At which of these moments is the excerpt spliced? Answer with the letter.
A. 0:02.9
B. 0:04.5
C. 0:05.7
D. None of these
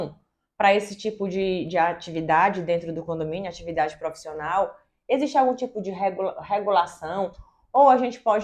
D